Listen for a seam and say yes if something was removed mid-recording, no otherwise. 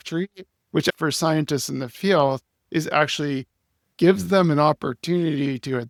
no